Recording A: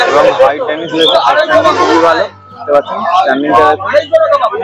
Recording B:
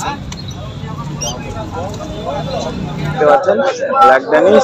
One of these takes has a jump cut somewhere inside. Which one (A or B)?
B